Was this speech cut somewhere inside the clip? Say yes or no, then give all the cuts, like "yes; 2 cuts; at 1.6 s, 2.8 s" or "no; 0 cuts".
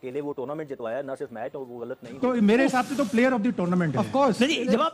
yes; 1 cut; at 2.1 s